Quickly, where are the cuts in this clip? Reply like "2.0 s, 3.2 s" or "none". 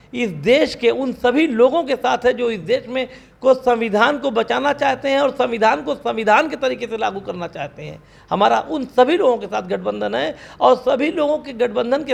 none